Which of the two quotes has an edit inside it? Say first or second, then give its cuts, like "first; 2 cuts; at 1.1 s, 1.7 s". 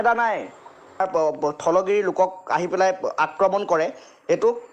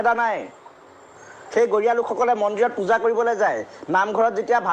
first; 1 cut; at 1.0 s